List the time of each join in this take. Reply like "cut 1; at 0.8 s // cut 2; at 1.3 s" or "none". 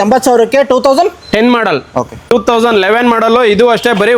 cut 1; at 2.3 s